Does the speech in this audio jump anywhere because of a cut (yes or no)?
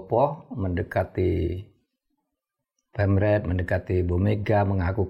no